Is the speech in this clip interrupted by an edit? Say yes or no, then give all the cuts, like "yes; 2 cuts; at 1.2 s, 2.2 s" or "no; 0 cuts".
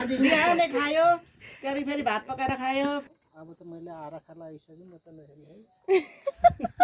yes; 1 cut; at 3.0 s